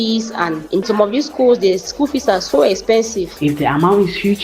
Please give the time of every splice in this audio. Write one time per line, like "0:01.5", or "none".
0:03.4

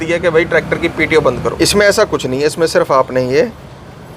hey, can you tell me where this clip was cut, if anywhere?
0:01.5

